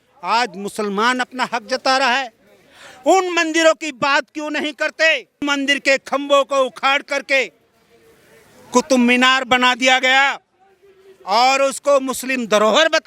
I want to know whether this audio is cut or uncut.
cut